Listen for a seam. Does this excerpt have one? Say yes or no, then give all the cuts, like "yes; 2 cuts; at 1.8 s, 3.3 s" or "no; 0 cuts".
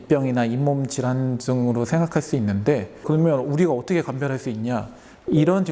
yes; 1 cut; at 2.9 s